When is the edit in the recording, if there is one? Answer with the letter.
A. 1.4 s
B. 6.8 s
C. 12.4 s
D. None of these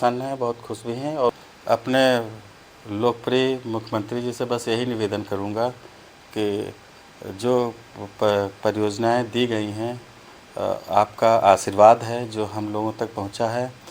A